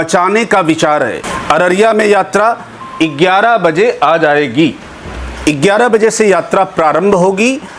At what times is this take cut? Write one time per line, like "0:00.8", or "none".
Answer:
0:01.3